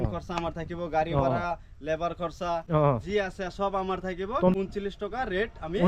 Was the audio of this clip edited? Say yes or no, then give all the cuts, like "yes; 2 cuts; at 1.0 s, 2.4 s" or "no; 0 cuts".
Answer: yes; 1 cut; at 4.5 s